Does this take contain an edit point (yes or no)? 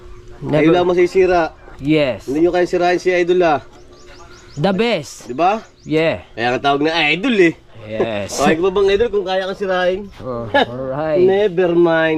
no